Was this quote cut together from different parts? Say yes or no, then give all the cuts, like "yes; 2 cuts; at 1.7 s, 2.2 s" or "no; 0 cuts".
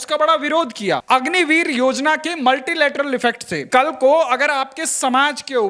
yes; 2 cuts; at 1.0 s, 3.7 s